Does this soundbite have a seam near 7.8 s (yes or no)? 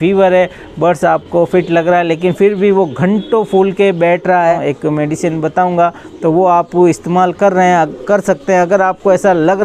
no